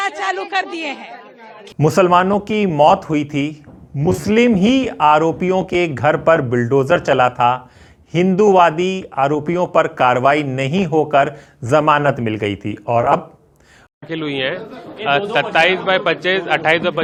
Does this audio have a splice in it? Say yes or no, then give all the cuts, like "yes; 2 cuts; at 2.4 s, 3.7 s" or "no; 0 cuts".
no; 0 cuts